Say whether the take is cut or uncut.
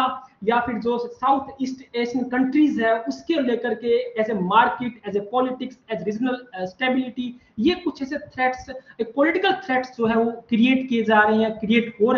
uncut